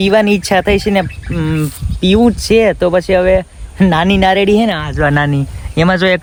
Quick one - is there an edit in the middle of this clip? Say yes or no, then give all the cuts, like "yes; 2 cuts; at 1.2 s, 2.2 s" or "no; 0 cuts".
no; 0 cuts